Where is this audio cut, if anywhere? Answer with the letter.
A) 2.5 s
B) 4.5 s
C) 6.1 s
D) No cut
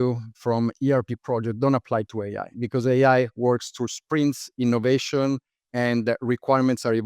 A